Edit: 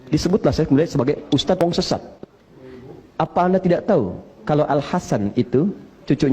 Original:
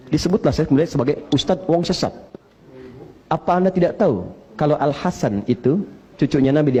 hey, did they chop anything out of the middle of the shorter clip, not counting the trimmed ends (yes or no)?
yes